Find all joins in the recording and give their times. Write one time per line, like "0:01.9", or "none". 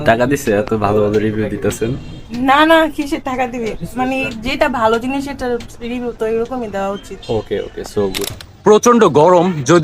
none